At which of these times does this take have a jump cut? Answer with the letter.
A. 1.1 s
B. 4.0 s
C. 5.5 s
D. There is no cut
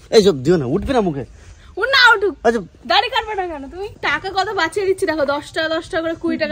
B